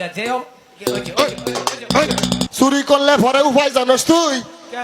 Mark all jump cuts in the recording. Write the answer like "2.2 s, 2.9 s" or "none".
2.5 s